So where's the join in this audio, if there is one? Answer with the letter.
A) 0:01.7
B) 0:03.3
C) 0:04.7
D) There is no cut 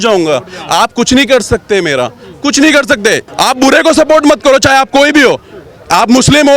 B